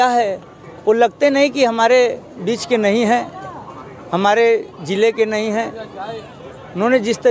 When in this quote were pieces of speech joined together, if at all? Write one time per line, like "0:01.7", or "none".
none

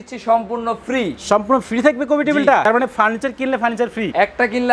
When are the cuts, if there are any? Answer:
0:02.6

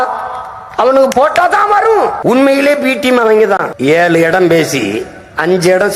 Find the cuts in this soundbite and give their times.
0:02.2
0:03.7

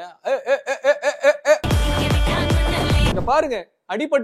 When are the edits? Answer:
0:01.7
0:03.1

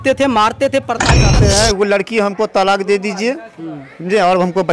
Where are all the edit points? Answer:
0:01.3

